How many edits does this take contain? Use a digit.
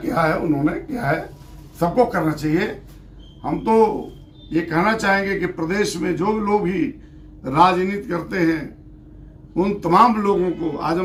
0